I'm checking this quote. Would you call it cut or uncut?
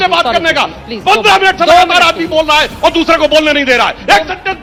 uncut